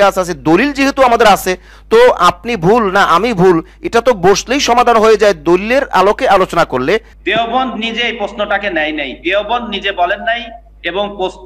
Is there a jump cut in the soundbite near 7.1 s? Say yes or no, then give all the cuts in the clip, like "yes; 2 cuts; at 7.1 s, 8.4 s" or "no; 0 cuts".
yes; 1 cut; at 7.1 s